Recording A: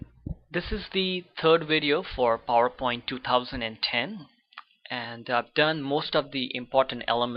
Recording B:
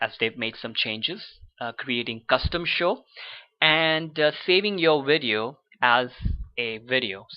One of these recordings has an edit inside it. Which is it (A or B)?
B